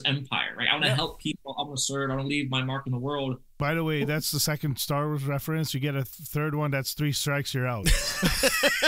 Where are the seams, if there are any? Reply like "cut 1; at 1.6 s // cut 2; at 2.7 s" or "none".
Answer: cut 1; at 3.5 s